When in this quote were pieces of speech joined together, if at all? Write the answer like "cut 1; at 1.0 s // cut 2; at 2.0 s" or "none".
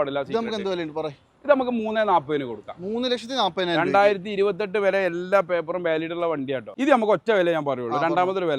cut 1; at 6.7 s